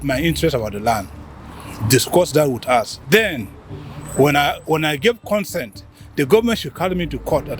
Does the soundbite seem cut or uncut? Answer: uncut